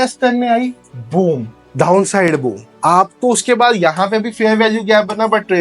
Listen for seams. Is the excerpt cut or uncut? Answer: uncut